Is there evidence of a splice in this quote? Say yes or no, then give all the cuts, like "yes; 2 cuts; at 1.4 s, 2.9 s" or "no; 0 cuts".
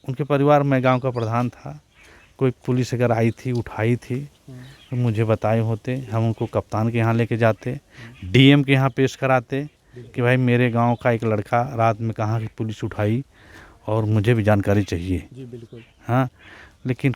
no; 0 cuts